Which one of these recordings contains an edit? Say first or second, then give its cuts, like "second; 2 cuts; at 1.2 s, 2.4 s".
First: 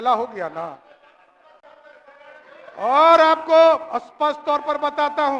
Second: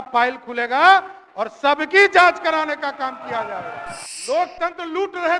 second; 1 cut; at 4.1 s